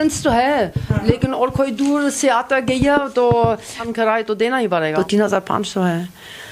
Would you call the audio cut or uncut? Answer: cut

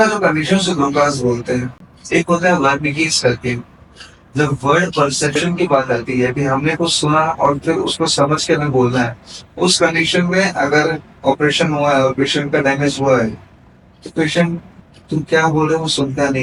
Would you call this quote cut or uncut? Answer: uncut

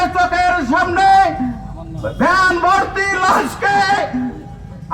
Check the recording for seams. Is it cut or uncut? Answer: uncut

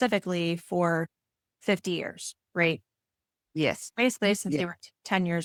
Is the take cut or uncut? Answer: uncut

